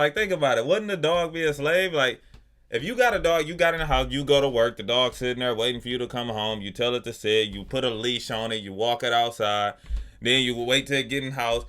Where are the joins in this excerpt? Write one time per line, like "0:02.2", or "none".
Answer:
none